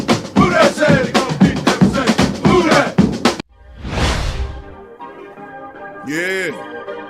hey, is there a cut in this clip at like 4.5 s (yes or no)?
yes